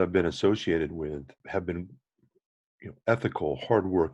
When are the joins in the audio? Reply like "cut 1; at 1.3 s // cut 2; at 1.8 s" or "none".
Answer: cut 1; at 1.4 s